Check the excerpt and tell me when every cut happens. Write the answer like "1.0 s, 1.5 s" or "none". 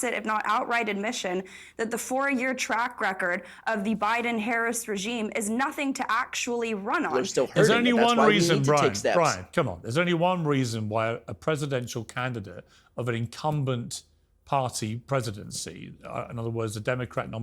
7.1 s